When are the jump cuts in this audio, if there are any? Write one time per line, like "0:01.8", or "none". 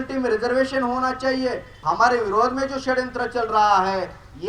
0:01.7